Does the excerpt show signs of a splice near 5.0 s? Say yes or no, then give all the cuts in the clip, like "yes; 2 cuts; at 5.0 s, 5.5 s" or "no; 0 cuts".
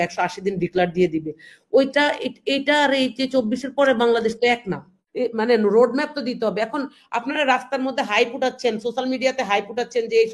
yes; 1 cut; at 5.0 s